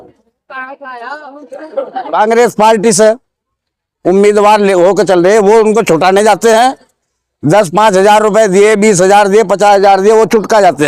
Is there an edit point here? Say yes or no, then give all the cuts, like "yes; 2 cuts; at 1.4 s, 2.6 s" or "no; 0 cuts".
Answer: no; 0 cuts